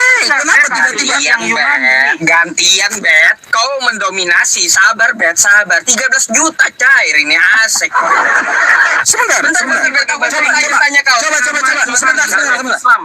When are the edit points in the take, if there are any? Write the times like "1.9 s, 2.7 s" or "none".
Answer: 2.2 s, 9.0 s